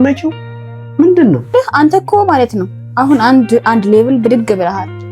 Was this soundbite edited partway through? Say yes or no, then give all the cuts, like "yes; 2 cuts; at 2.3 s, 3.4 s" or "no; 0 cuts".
yes; 1 cut; at 1.5 s